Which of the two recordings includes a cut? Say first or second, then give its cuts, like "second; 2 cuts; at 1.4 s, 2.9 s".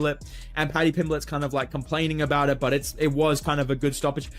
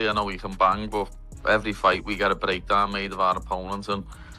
first; 1 cut; at 3.1 s